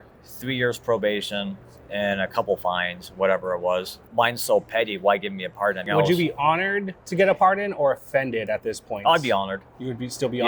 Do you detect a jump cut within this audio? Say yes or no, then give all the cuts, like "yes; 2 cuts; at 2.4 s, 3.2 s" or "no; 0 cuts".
yes; 2 cuts; at 4.0 s, 5.9 s